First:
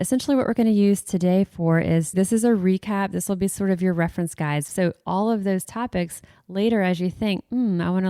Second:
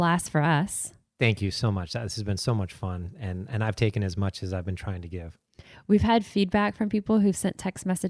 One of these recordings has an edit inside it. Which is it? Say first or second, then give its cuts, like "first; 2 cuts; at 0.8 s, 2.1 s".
first; 2 cuts; at 2.2 s, 4.7 s